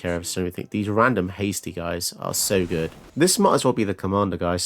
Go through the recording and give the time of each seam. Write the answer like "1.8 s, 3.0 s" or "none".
3.0 s